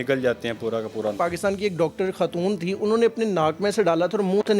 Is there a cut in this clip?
yes; 1 cut; at 1.1 s

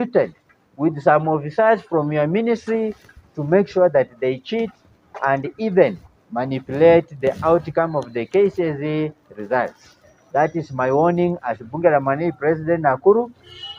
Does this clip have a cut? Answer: no; 0 cuts

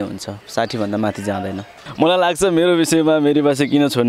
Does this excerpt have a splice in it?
yes; 1 cut; at 1.8 s

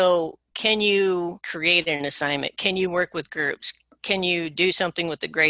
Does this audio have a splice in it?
yes; 1 cut; at 1.5 s

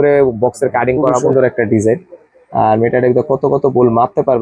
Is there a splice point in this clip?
yes; 1 cut; at 1.3 s

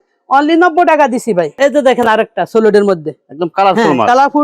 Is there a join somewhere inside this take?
yes; 1 cut; at 1.5 s

